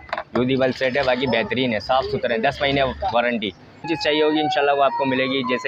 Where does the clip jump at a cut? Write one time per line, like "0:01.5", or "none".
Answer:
0:03.9